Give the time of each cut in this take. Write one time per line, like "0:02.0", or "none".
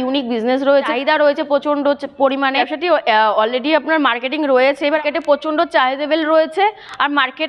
0:00.9
0:02.7
0:05.0